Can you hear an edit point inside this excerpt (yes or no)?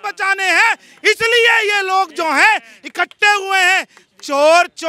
no